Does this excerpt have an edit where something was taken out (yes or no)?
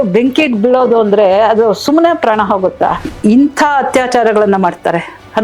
yes